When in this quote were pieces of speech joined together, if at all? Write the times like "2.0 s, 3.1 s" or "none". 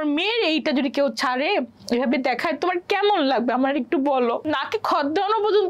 4.4 s